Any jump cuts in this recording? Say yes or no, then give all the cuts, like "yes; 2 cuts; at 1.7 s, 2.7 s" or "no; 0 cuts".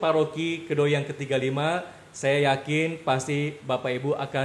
no; 0 cuts